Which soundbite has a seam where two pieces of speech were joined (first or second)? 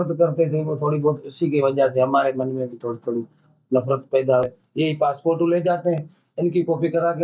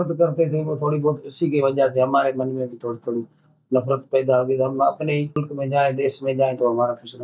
first